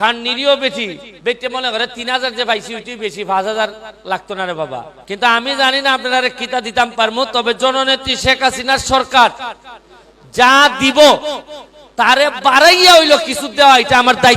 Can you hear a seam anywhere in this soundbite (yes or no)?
yes